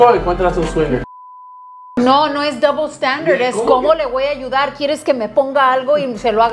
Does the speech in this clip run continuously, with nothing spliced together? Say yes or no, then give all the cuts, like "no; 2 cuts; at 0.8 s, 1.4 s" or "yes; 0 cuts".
no; 1 cut; at 1.7 s